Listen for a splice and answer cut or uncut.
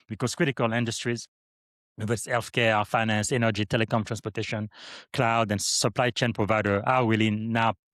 uncut